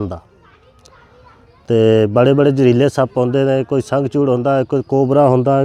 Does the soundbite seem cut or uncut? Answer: uncut